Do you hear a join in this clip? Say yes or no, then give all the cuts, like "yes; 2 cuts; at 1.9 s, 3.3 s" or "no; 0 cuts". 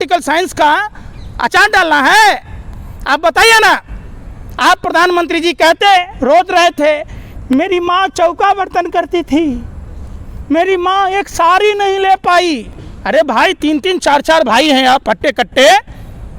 no; 0 cuts